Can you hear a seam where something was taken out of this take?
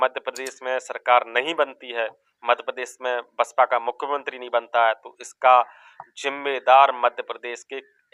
no; 0 cuts

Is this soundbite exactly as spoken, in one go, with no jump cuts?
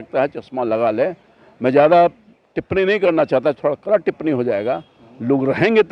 yes; 0 cuts

